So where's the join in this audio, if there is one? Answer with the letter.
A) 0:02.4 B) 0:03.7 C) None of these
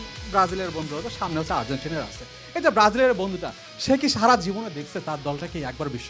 C